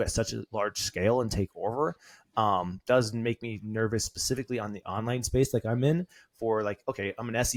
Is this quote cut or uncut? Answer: uncut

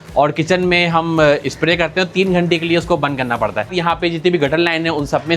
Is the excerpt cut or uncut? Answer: cut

